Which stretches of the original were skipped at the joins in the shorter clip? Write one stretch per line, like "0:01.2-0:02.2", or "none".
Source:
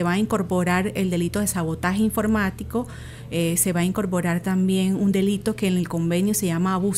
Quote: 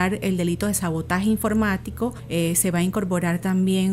0:02.9-0:03.2